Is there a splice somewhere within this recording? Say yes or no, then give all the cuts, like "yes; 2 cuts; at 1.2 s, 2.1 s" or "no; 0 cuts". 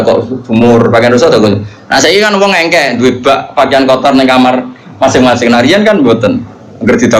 no; 0 cuts